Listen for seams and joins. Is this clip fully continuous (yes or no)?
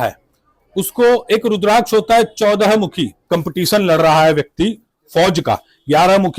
no